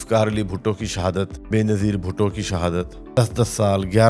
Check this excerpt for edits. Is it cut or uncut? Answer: cut